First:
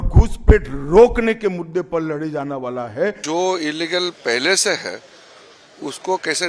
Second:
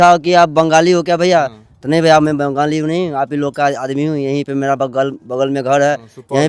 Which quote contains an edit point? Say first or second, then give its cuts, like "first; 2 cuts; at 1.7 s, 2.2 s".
first; 1 cut; at 3.2 s